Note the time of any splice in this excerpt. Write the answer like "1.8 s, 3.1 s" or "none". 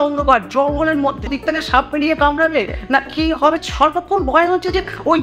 1.3 s, 3.6 s